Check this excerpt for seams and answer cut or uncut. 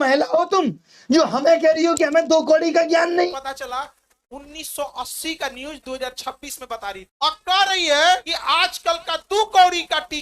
cut